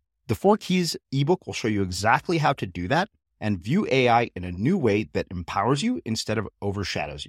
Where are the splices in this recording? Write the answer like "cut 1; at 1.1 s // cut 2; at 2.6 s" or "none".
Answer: none

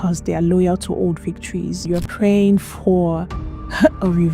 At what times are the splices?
cut 1; at 1.8 s

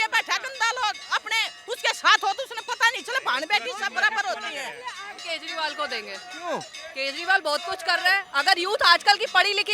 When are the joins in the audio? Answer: cut 1; at 5.2 s

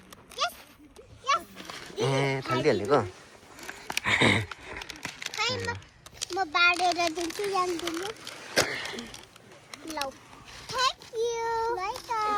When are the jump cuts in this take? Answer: none

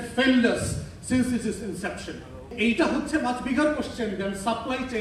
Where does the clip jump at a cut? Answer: cut 1; at 2.5 s

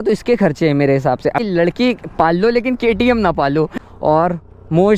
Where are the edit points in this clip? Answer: cut 1; at 1.4 s // cut 2; at 3.8 s

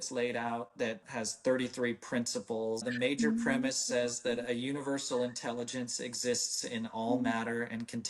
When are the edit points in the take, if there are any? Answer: cut 1; at 1.0 s // cut 2; at 2.8 s

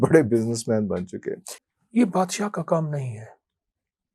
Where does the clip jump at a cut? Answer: cut 1; at 1.5 s

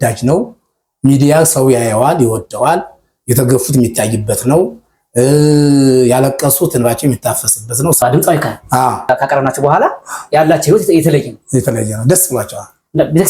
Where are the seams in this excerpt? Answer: cut 1; at 8.0 s

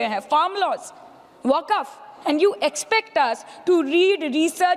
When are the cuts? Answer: cut 1; at 2.1 s

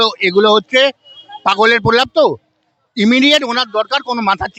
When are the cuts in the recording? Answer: none

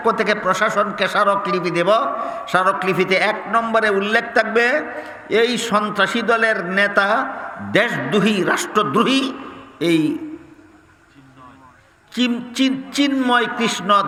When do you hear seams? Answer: none

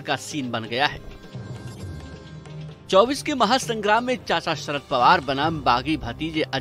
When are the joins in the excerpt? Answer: cut 1; at 1.0 s // cut 2; at 2.9 s

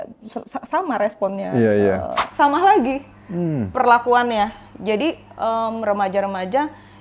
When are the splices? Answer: cut 1; at 2.2 s

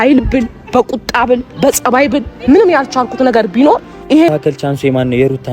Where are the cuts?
cut 1; at 4.3 s

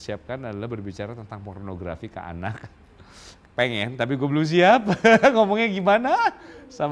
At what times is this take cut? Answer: cut 1; at 3.4 s

